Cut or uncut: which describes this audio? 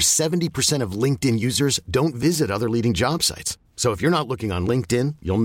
uncut